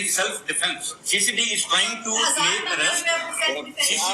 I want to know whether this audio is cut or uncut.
cut